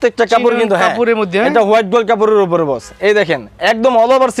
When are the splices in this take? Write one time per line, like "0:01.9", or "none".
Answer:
none